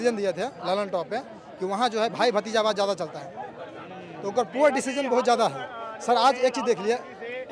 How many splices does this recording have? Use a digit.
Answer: 0